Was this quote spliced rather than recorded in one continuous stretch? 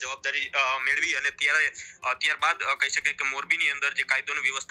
no; 0 cuts

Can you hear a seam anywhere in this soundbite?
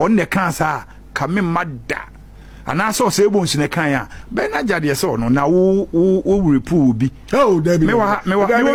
no; 0 cuts

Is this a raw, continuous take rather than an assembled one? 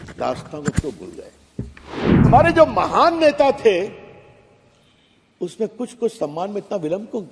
no; 1 cut; at 2.3 s

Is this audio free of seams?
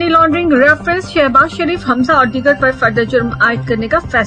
yes; 0 cuts

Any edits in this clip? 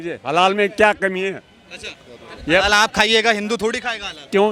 no; 0 cuts

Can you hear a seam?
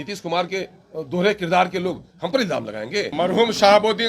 yes; 1 cut; at 3.1 s

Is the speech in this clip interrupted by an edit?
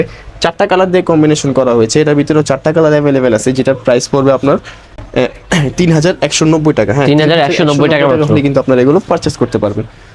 no; 0 cuts

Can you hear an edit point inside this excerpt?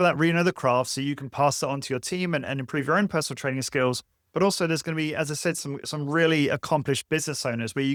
no; 0 cuts

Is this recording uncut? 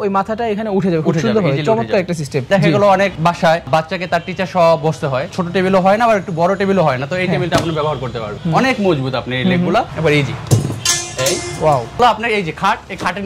no; 5 cuts; at 2.5 s, 5.3 s, 8.3 s, 9.9 s, 12.0 s

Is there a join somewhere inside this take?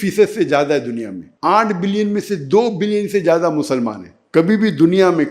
no; 0 cuts

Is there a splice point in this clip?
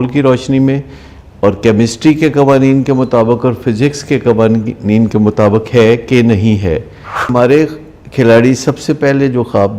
yes; 1 cut; at 7.3 s

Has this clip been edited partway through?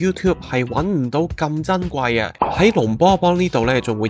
yes; 1 cut; at 2.3 s

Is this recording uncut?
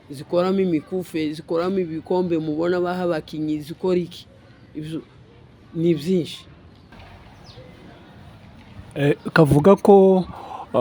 no; 1 cut; at 6.9 s

